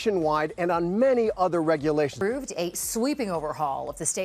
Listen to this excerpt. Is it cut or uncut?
cut